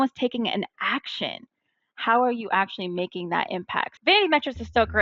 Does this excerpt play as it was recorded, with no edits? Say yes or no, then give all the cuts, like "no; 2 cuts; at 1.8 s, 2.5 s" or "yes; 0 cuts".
no; 1 cut; at 3.9 s